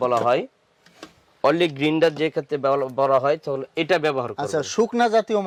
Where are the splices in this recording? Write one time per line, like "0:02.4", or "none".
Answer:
none